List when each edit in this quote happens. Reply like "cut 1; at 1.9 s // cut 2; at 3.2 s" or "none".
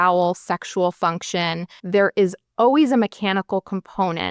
cut 1; at 1.7 s

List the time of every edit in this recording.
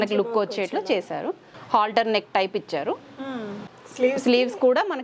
cut 1; at 1.5 s

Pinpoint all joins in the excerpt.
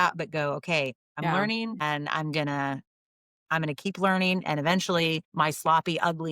cut 1; at 1.0 s // cut 2; at 5.3 s

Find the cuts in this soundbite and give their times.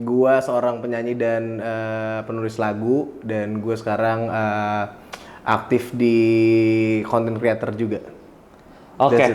none

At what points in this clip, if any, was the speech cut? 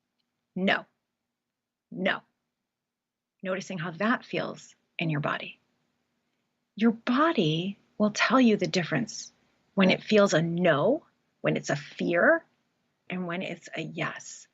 cut 1; at 13.1 s

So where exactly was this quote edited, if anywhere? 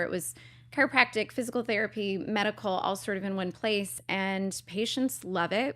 cut 1; at 4.0 s

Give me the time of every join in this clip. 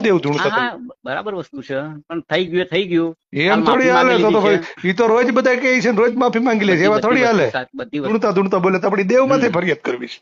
cut 1; at 8.1 s

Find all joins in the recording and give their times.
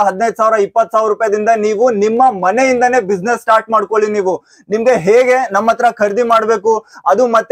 none

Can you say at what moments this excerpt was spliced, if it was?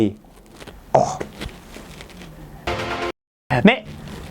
cut 1; at 2.8 s

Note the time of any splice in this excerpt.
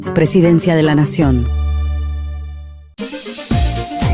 cut 1; at 3.0 s

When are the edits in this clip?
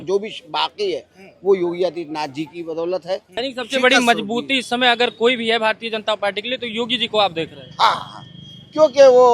cut 1; at 3.4 s

